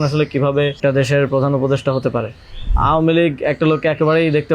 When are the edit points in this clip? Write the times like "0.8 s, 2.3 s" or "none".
0.8 s, 2.7 s